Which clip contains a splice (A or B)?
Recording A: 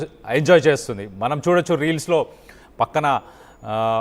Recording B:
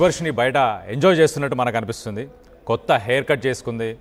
A